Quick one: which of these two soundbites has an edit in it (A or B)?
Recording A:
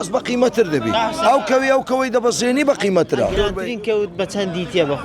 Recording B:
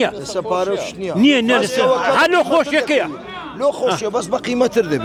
A